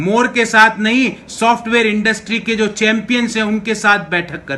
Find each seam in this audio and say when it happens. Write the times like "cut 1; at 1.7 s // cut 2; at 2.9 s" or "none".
none

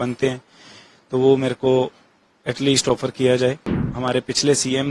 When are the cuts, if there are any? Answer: cut 1; at 3.7 s

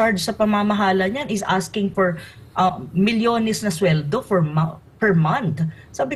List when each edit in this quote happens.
none

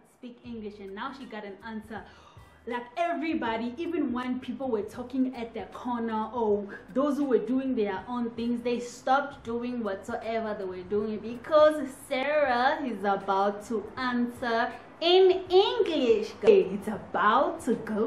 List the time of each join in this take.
cut 1; at 16.5 s

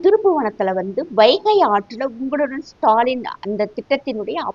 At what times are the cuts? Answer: none

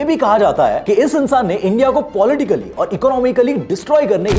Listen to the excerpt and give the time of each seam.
none

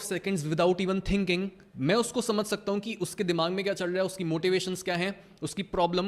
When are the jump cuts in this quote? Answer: cut 1; at 1.6 s

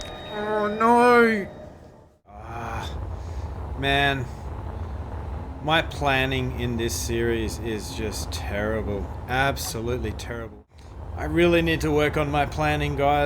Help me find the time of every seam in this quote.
cut 1; at 2.5 s // cut 2; at 10.6 s

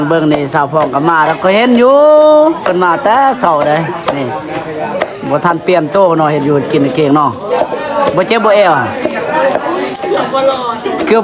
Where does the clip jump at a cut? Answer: none

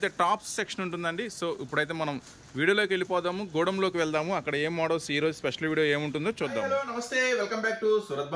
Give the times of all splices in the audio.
cut 1; at 6.7 s

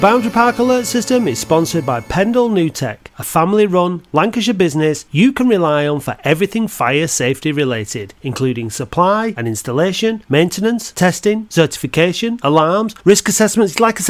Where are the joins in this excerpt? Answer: none

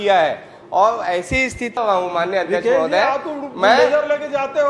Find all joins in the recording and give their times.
cut 1; at 1.8 s

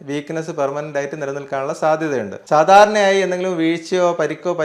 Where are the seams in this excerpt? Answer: cut 1; at 2.4 s

